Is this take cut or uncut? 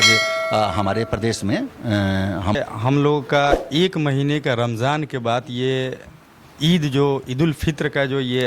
cut